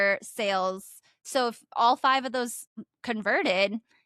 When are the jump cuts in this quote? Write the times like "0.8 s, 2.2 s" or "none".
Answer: 1.2 s, 2.9 s